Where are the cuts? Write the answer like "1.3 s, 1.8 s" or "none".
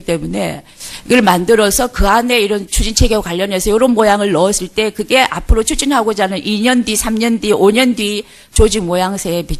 none